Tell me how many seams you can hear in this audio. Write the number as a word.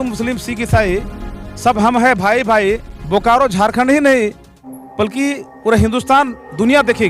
one